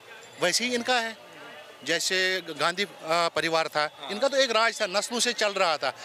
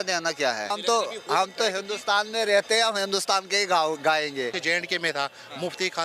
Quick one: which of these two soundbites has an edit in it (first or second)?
second